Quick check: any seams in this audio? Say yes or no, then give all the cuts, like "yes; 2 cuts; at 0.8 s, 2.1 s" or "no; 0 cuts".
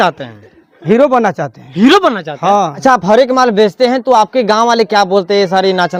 no; 0 cuts